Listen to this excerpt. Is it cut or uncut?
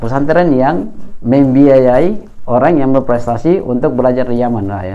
uncut